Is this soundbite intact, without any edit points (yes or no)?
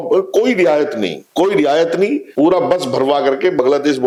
yes